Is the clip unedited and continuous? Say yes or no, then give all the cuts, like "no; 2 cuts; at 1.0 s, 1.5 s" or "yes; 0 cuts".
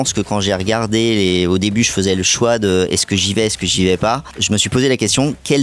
yes; 0 cuts